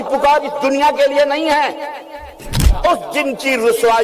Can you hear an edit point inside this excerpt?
yes; 1 cut; at 2.7 s

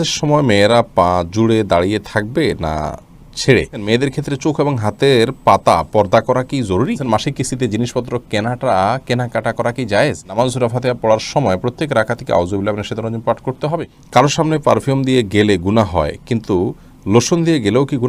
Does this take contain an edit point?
yes; 4 cuts; at 3.8 s, 7.0 s, 10.4 s, 13.9 s

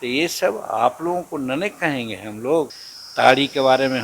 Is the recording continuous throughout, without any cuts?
no; 1 cut; at 2.9 s

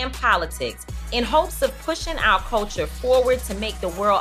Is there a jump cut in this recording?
no; 0 cuts

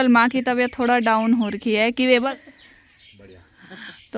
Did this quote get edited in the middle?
yes; 1 cut; at 2.3 s

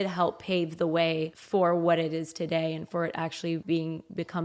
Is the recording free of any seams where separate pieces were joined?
no; 2 cuts; at 1.4 s, 3.6 s

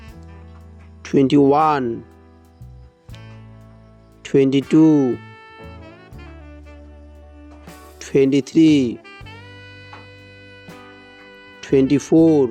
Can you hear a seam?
no; 0 cuts

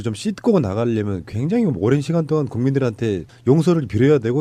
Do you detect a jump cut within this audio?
no; 0 cuts

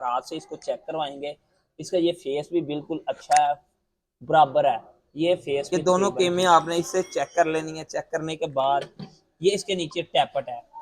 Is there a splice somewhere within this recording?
yes; 1 cut; at 5.7 s

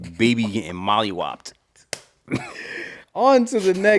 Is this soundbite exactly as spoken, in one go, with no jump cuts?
yes; 0 cuts

